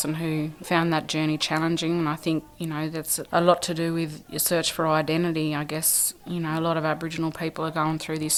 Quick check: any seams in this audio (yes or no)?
no